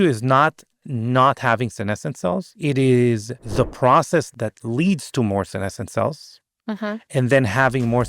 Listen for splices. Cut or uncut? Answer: cut